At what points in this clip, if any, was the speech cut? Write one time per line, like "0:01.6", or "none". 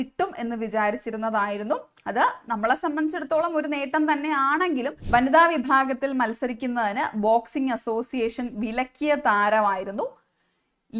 0:05.0